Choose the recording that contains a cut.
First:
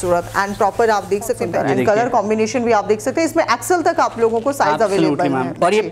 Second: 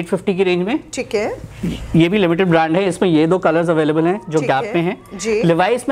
first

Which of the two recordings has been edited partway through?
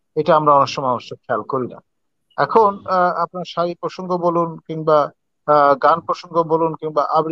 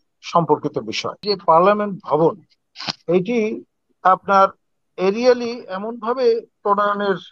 second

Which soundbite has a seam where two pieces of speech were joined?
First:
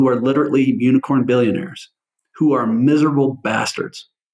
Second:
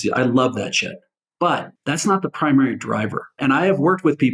second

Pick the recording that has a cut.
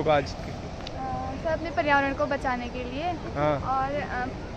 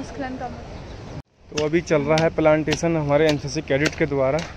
second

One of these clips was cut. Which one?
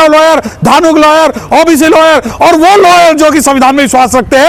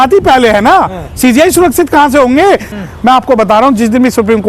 second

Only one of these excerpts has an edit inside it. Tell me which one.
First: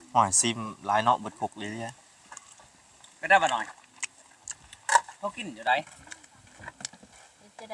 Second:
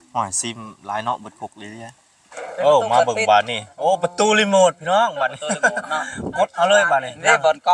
second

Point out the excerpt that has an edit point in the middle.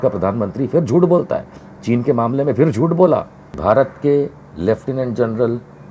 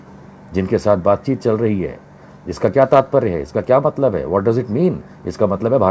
first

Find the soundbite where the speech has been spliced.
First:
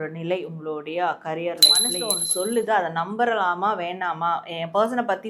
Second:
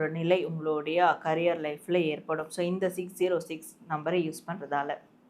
first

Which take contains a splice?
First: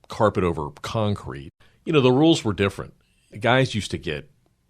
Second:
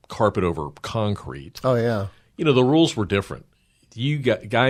first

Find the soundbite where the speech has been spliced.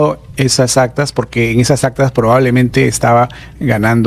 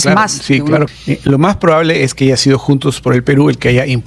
second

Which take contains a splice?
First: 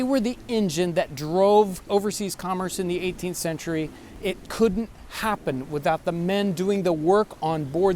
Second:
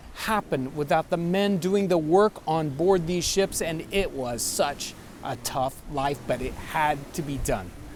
first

